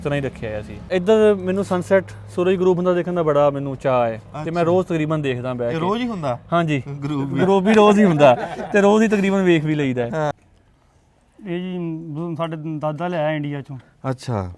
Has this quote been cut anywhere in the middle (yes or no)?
yes